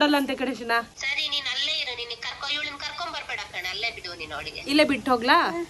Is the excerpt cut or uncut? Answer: cut